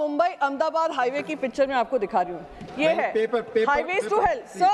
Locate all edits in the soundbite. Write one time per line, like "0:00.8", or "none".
none